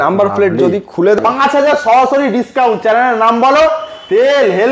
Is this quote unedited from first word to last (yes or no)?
no